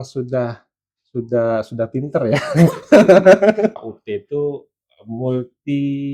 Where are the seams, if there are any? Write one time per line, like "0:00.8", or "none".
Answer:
0:03.7